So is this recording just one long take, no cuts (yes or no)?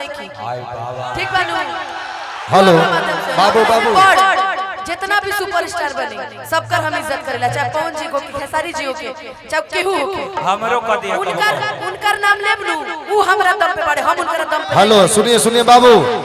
no